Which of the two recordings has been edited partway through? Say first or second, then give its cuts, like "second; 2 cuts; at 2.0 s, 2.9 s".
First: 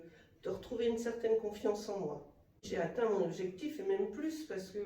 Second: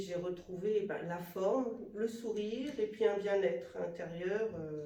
first; 1 cut; at 2.6 s